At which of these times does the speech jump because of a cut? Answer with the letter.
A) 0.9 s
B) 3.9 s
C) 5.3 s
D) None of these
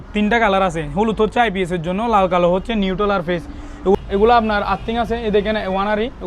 B